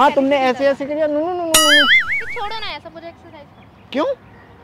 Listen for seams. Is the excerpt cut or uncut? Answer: uncut